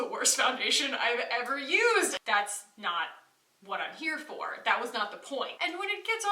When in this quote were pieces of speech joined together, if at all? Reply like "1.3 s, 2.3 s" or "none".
2.1 s, 5.5 s